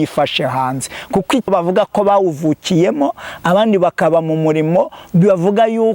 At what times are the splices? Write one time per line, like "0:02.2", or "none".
0:01.5